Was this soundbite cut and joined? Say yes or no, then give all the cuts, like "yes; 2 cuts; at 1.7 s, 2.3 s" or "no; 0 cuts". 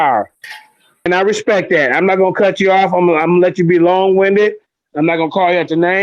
yes; 1 cut; at 1.1 s